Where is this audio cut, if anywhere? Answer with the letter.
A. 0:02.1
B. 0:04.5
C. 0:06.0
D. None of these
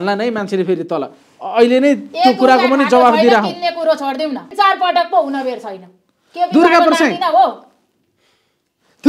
B